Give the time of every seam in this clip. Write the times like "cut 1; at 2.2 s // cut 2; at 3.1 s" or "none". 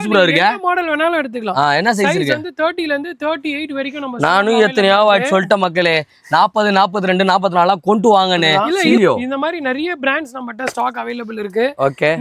cut 1; at 9.0 s